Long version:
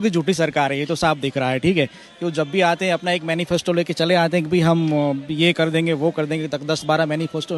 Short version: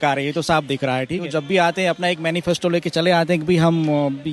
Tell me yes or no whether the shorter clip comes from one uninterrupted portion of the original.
no